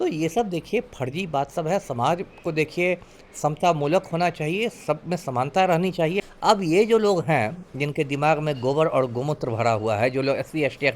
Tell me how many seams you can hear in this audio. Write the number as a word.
one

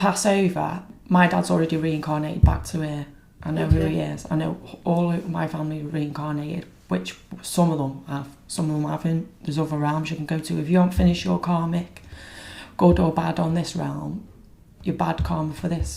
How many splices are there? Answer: one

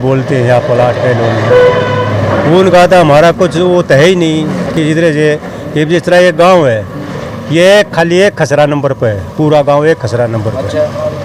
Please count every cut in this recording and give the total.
zero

